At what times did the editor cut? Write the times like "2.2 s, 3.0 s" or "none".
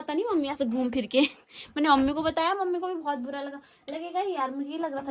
none